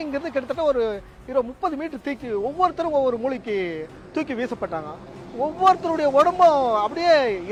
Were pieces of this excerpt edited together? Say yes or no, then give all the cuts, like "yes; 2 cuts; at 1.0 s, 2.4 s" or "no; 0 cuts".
no; 0 cuts